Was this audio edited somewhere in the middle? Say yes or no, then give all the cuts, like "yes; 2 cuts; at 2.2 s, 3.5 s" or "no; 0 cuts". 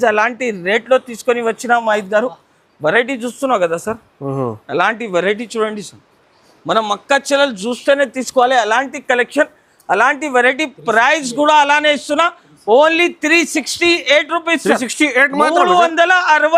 no; 0 cuts